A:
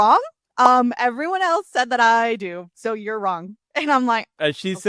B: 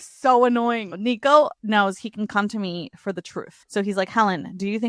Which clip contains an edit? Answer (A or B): B